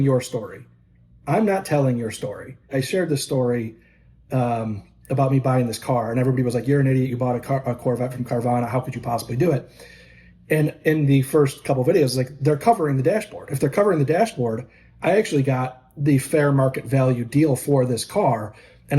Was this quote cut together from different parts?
yes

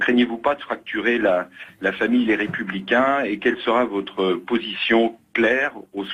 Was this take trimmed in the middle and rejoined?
no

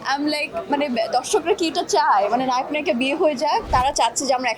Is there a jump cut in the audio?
yes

